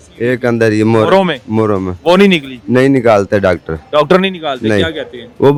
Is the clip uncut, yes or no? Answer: yes